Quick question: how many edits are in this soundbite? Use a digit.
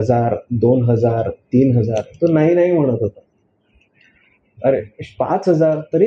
0